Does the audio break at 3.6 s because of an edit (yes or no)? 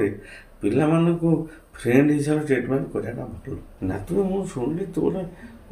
yes